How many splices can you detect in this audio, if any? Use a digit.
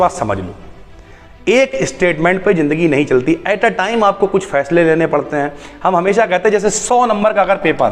0